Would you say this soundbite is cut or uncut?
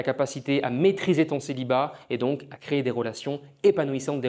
uncut